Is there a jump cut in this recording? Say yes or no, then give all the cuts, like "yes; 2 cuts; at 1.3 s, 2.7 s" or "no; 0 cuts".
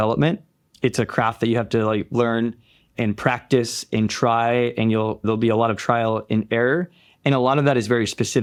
no; 0 cuts